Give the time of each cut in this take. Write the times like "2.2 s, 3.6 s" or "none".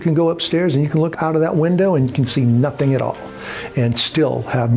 1.1 s

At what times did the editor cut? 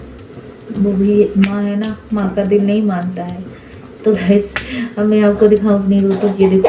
none

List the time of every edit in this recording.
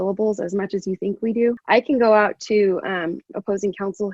1.6 s

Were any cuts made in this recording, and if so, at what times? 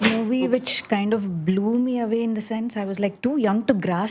none

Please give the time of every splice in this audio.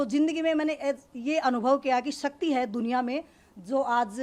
none

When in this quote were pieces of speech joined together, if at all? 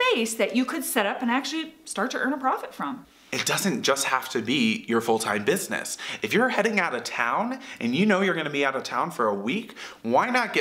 3.0 s

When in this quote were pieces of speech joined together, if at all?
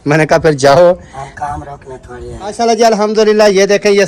2.4 s

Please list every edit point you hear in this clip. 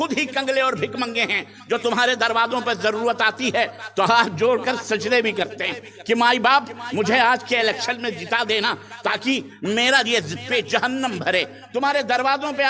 none

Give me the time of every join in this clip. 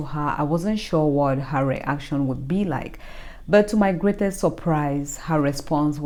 none

